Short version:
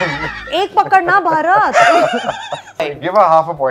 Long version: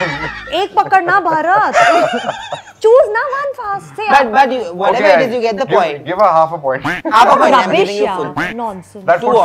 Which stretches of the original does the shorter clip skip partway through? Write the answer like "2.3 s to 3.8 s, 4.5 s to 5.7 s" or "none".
2.8 s to 5.8 s